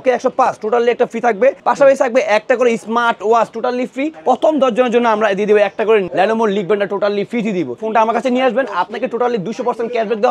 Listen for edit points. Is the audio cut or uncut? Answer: cut